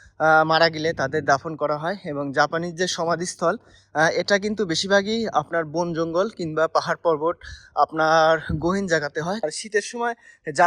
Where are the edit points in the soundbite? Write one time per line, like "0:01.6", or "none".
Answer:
0:09.4

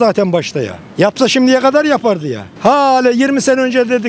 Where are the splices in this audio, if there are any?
none

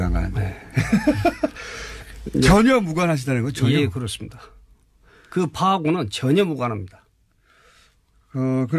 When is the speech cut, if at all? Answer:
0:05.1

